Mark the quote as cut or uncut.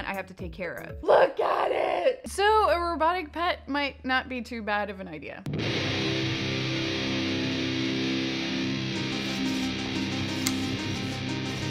cut